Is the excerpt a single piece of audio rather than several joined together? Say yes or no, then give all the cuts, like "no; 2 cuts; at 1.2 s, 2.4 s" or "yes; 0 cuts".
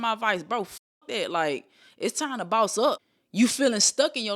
no; 1 cut; at 3.1 s